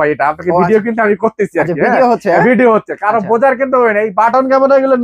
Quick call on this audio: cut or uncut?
uncut